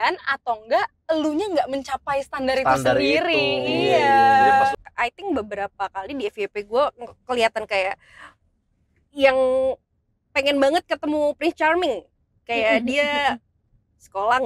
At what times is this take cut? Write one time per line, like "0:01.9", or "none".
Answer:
0:04.8